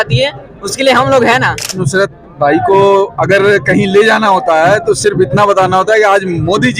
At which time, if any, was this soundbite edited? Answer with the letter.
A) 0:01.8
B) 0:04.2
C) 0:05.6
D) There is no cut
A